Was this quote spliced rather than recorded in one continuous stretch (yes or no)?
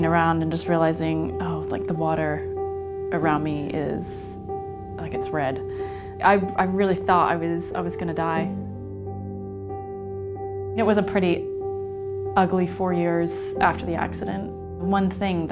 yes